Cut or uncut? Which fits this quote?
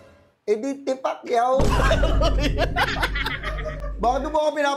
uncut